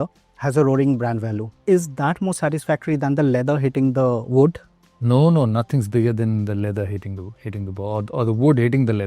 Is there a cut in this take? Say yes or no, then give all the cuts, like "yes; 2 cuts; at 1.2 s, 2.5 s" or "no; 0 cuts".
yes; 1 cut; at 1.5 s